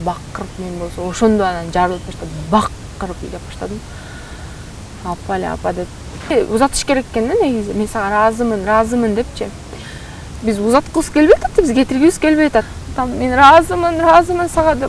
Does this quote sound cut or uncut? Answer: cut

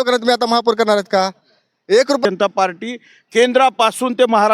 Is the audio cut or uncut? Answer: cut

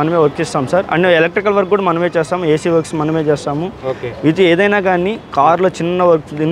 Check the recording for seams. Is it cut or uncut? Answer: uncut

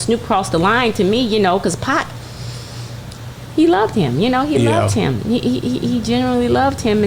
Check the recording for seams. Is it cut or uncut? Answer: uncut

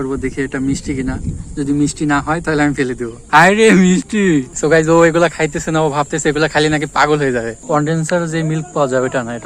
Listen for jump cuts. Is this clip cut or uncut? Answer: cut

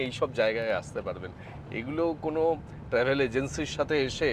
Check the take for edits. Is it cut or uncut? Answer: uncut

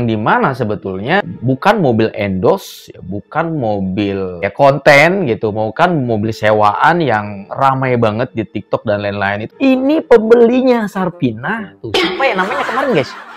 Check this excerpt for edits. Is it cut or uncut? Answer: cut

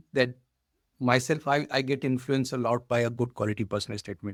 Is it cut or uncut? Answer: uncut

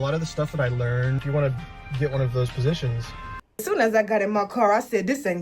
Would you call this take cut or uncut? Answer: cut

